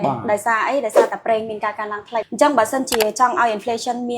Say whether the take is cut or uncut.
cut